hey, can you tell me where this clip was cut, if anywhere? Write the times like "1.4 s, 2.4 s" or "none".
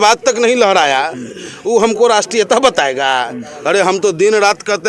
none